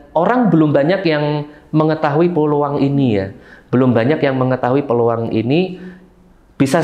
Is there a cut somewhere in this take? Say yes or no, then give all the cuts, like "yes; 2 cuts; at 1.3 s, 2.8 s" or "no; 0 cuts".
no; 0 cuts